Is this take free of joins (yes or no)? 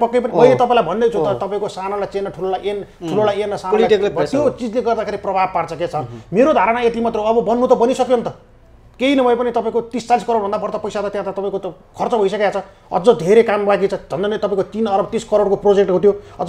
yes